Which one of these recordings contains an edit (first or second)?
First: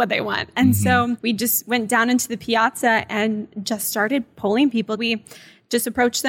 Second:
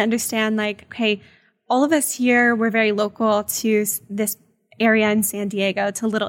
first